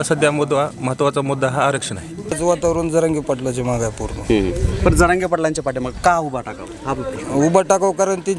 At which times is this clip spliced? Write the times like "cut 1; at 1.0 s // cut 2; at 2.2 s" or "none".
cut 1; at 2.4 s